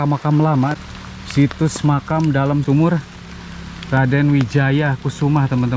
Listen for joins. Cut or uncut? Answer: cut